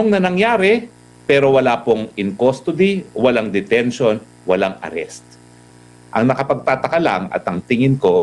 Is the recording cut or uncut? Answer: cut